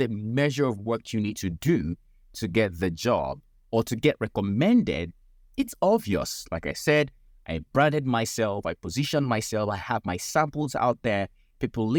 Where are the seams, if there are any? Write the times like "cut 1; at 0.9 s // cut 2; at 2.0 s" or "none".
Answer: none